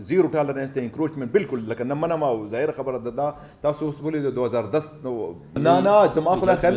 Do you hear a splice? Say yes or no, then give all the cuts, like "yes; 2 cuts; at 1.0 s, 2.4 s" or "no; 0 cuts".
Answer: yes; 1 cut; at 5.6 s